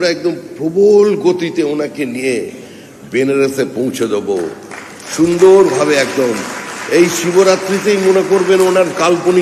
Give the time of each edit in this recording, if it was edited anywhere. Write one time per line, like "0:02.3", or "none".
none